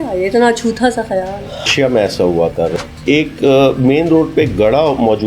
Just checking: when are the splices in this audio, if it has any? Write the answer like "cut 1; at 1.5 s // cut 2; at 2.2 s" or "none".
cut 1; at 1.7 s // cut 2; at 2.8 s